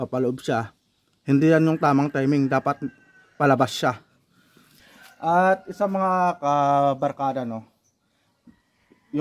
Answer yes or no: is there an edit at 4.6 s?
yes